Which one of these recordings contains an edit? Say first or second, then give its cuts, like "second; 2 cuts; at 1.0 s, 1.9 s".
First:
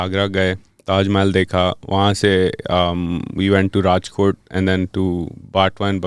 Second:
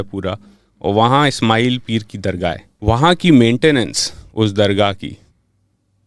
second; 1 cut; at 2.7 s